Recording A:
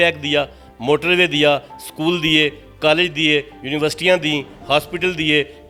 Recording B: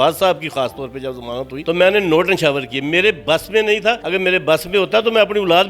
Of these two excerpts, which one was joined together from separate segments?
B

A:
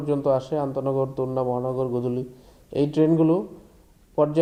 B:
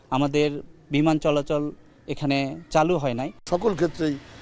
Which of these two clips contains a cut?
B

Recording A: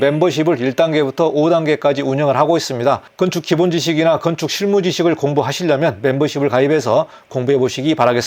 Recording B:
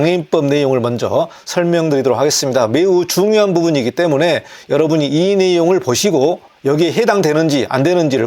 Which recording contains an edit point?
B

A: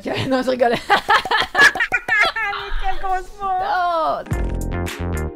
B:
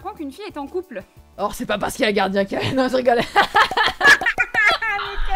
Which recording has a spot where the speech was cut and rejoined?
A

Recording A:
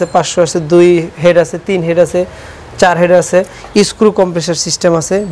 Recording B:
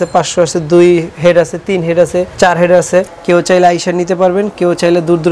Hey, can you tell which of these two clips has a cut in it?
B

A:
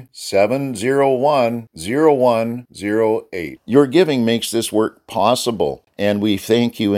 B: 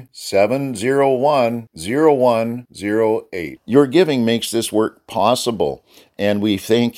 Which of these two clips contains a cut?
A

